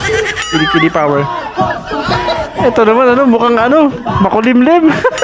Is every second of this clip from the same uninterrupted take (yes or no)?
yes